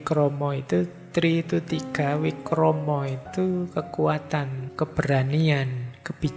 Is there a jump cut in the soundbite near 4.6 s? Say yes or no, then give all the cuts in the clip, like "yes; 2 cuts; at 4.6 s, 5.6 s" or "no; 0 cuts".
yes; 1 cut; at 4.6 s